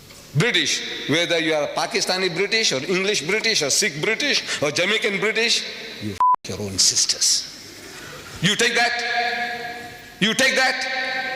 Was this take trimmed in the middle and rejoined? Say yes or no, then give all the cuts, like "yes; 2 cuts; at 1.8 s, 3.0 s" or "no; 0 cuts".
no; 0 cuts